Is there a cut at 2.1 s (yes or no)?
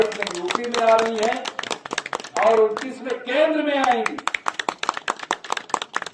no